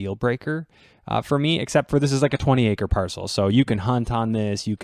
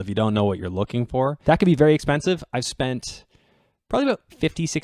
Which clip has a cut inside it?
second; 1 cut; at 1.4 s

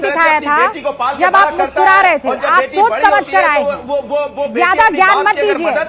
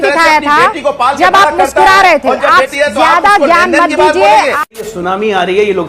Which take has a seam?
second; 2 cuts; at 2.7 s, 4.6 s

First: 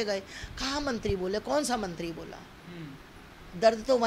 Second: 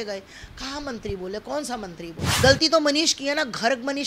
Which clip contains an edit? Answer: second; 1 cut; at 2.2 s

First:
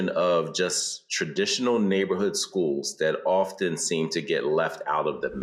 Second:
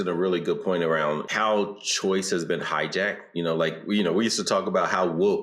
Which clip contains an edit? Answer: second; 1 cut; at 1.3 s

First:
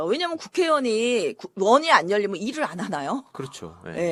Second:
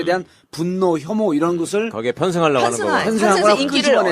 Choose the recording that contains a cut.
second; 1 cut; at 1.3 s

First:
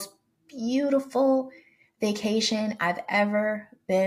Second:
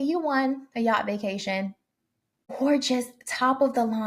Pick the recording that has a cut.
second; 1 cut; at 2.5 s

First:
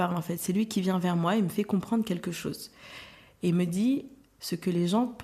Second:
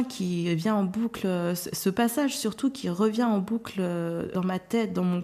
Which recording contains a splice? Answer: second; 1 cut; at 4.3 s

